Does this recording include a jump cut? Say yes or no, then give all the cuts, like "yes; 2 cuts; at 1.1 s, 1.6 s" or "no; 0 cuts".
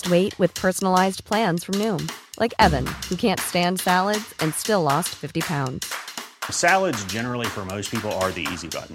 no; 0 cuts